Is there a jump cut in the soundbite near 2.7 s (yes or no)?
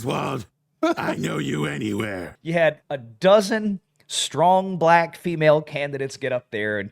yes